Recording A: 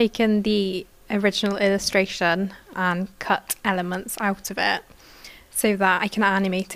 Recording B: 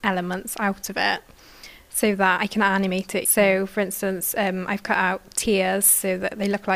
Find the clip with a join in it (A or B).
A